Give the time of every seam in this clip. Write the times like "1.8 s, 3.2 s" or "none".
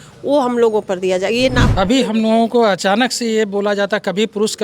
1.6 s